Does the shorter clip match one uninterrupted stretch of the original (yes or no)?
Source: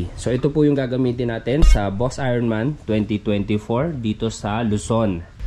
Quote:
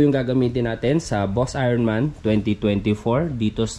yes